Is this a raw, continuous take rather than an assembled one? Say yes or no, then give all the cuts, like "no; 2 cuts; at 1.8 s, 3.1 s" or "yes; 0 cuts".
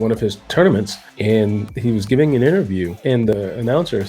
no; 1 cut; at 2.9 s